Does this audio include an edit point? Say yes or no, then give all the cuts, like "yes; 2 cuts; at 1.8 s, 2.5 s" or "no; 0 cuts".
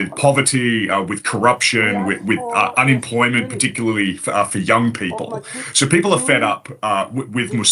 no; 0 cuts